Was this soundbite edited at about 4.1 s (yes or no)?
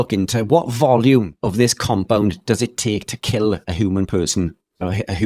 no